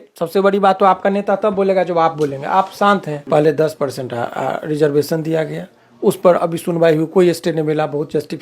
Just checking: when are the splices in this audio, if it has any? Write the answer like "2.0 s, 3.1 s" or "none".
3.1 s